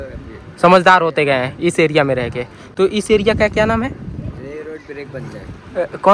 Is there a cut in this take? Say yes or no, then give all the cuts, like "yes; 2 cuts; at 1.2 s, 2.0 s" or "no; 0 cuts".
no; 0 cuts